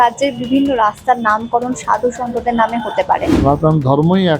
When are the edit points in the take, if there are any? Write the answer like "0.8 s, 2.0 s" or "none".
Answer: 3.3 s